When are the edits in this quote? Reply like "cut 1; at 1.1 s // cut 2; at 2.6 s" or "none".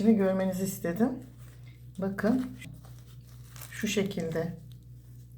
cut 1; at 2.6 s